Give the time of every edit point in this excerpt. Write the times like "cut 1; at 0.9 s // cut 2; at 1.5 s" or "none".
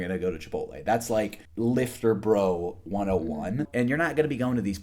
cut 1; at 1.4 s // cut 2; at 3.7 s